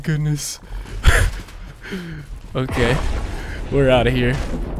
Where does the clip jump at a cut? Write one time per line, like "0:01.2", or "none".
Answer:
none